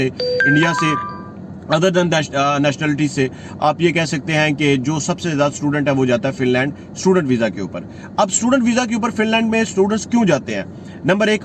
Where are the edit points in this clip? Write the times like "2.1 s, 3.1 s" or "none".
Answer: none